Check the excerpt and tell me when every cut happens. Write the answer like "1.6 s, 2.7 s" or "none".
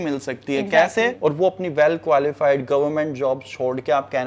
1.2 s